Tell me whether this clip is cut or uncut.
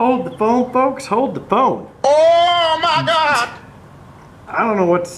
cut